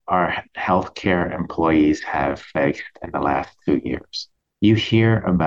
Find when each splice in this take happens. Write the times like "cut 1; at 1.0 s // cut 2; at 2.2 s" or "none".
cut 1; at 4.2 s